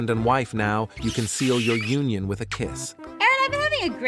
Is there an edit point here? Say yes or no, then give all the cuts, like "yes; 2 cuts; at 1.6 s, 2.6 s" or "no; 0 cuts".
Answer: no; 0 cuts